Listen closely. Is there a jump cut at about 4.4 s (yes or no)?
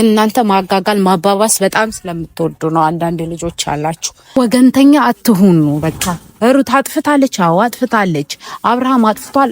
yes